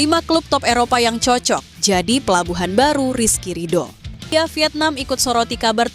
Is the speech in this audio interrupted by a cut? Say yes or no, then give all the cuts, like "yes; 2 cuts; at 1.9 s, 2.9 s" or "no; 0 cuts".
yes; 1 cut; at 4.3 s